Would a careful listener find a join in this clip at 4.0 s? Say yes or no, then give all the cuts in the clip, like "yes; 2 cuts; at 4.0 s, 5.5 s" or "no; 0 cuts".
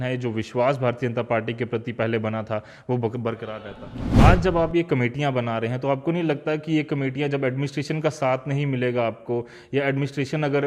yes; 1 cut; at 4.0 s